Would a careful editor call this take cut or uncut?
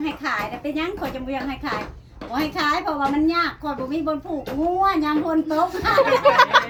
uncut